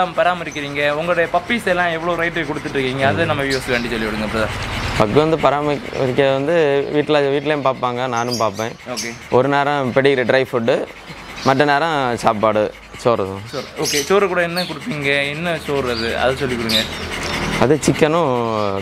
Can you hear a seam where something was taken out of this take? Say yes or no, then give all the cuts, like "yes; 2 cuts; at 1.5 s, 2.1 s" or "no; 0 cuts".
no; 0 cuts